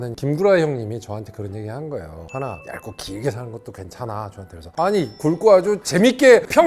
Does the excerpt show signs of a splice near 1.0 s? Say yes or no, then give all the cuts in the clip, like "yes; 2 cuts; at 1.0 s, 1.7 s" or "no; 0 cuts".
no; 0 cuts